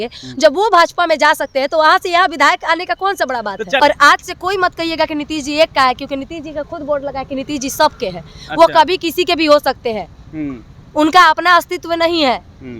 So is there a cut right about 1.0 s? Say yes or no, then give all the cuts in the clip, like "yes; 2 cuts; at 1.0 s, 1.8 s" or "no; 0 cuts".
no; 1 cut; at 3.8 s